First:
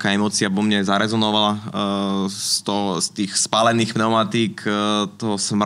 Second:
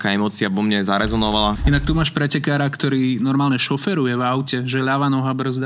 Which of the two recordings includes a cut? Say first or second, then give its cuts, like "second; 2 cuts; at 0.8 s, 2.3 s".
second; 1 cut; at 1.6 s